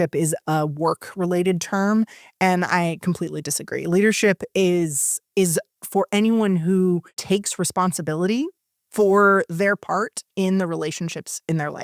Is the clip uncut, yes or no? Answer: no